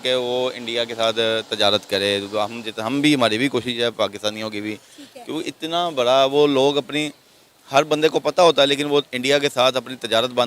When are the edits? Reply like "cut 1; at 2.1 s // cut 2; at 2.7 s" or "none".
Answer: none